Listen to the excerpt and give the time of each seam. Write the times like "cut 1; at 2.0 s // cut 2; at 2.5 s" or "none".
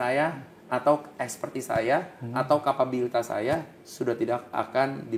none